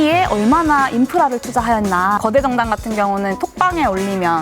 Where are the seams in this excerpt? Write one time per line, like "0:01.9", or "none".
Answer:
0:02.2